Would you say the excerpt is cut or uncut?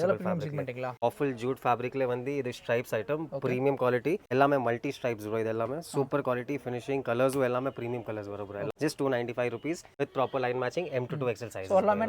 cut